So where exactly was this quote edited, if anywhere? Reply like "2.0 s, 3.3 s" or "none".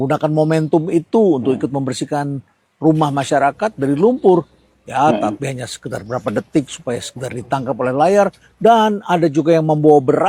none

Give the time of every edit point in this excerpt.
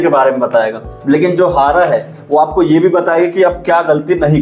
none

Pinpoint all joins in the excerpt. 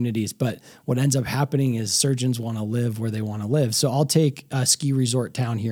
none

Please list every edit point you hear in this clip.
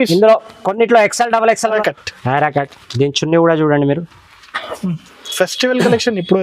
1.8 s

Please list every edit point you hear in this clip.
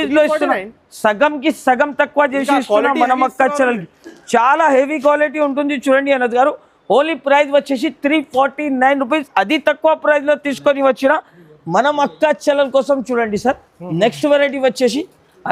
none

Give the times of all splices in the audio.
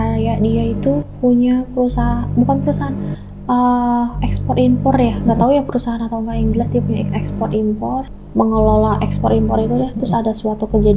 8.1 s

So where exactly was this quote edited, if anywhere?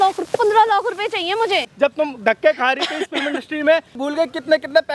1.7 s, 4.0 s

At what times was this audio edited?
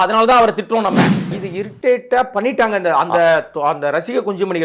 1.4 s

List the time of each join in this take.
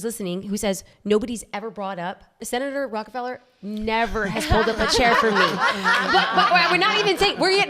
2.4 s

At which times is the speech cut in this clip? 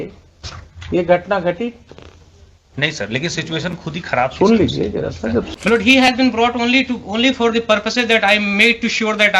5.5 s

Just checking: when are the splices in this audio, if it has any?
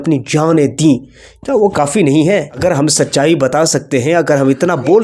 2.5 s

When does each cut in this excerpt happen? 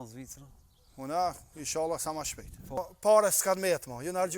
2.8 s

